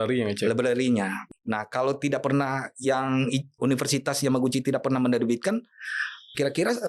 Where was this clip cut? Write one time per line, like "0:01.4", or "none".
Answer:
0:01.2